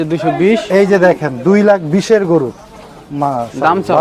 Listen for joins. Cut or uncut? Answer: uncut